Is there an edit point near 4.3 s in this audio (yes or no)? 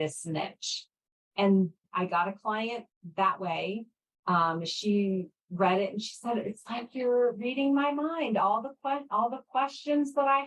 no